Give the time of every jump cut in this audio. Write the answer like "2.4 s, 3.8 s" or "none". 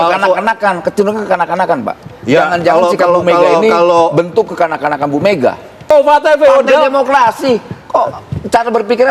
5.9 s